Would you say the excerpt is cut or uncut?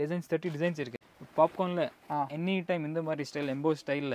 cut